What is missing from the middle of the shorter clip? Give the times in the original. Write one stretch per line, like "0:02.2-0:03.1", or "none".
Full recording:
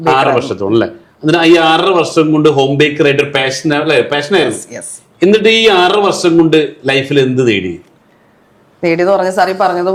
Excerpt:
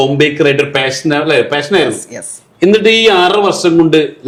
none